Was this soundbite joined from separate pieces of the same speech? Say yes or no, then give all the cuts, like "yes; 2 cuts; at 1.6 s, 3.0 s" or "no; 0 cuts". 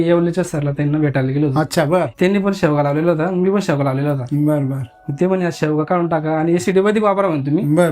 yes; 1 cut; at 2.1 s